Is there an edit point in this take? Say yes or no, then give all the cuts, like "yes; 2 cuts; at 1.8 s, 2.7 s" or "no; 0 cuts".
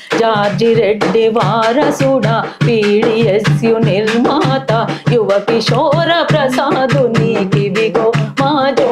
no; 0 cuts